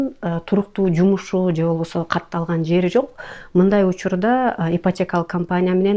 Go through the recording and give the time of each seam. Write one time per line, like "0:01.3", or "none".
none